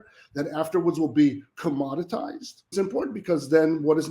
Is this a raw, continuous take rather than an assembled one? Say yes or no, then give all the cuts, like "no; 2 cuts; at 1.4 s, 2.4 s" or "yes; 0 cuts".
no; 1 cut; at 2.7 s